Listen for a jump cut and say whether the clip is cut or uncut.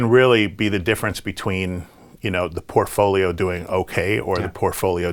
uncut